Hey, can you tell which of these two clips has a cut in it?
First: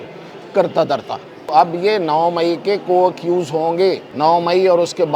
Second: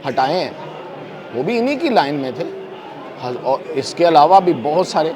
first; 2 cuts; at 1.5 s, 4.1 s

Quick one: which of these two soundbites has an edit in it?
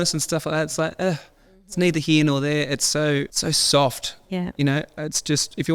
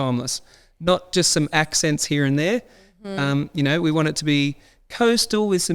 first; 1 cut; at 3.3 s

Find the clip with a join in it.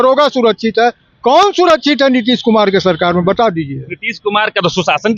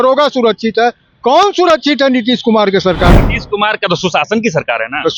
second; 1 cut; at 3.1 s

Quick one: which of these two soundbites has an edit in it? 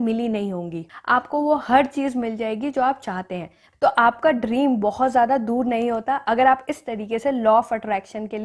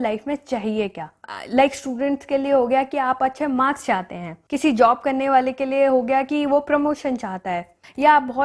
first; 2 cuts; at 0.9 s, 3.6 s

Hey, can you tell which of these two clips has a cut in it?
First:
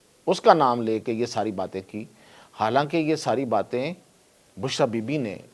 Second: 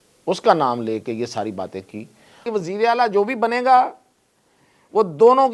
second; 1 cut; at 2.5 s

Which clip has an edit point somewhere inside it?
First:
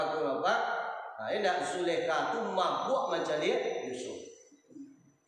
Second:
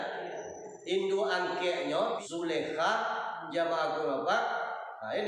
second; 1 cut; at 2.2 s

